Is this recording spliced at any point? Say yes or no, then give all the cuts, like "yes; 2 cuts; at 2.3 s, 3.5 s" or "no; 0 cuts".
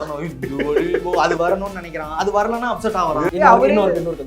yes; 1 cut; at 3.3 s